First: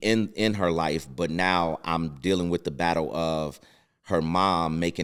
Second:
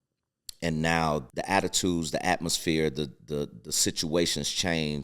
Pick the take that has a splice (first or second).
second